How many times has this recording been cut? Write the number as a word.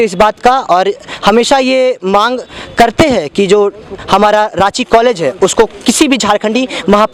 zero